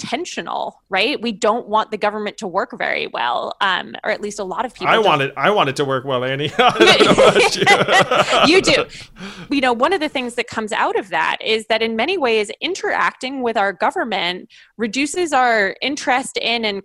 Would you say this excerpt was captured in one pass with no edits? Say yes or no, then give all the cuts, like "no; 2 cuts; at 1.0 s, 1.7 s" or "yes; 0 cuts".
no; 1 cut; at 9.0 s